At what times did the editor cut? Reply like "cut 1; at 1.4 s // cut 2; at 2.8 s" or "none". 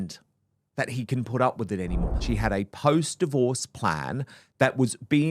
cut 1; at 2.2 s